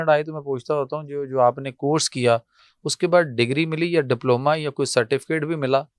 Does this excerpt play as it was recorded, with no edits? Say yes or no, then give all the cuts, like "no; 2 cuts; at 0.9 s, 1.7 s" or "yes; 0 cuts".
yes; 0 cuts